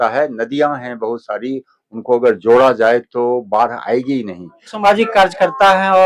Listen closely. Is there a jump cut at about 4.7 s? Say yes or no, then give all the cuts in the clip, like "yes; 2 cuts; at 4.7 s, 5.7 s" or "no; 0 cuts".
yes; 1 cut; at 4.7 s